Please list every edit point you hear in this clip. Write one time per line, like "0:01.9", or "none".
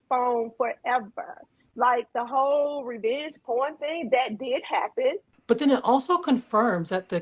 0:05.3